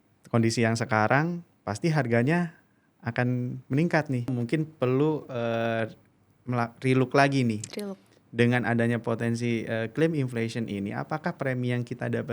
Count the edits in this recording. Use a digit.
1